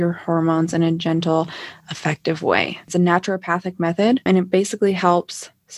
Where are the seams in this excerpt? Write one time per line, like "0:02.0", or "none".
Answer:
0:02.9
0:04.2